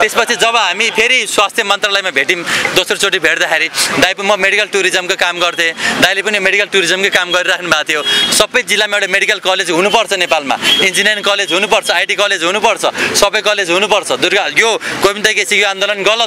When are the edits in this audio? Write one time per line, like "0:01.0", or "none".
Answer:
none